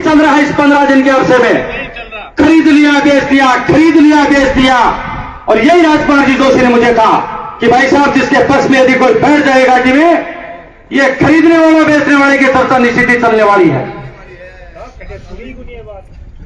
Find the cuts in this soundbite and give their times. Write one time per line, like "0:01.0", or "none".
none